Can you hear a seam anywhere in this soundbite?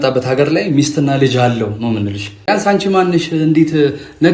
yes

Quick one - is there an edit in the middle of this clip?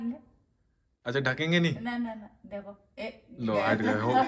no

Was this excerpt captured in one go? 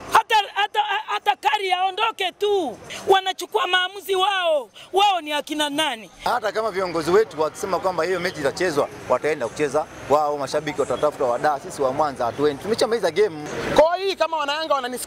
no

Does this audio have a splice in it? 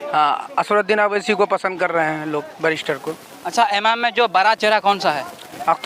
no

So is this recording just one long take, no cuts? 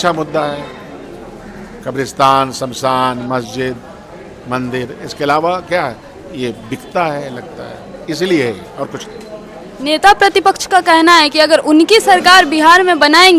yes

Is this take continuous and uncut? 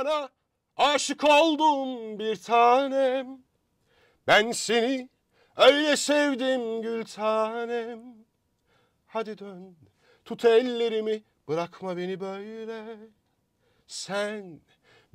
yes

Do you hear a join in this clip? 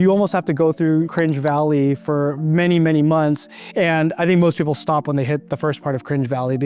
yes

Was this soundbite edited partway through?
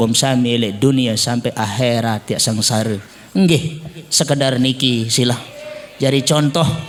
no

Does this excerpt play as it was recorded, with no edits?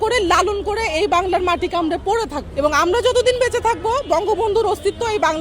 no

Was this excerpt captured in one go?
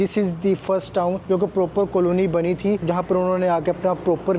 no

